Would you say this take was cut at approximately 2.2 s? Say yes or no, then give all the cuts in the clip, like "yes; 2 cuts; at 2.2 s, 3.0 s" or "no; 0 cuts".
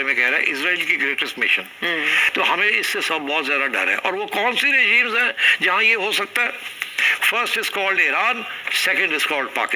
yes; 1 cut; at 2.2 s